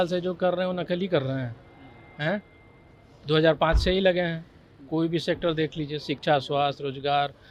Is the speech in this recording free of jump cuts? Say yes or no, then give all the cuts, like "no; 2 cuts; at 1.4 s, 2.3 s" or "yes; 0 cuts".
yes; 0 cuts